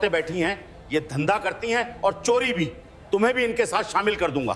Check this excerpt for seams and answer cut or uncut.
uncut